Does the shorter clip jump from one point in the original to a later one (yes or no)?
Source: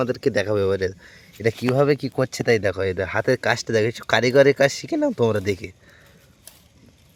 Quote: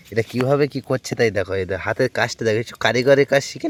no